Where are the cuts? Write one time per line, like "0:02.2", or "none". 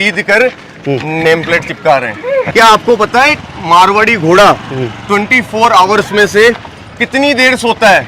0:02.5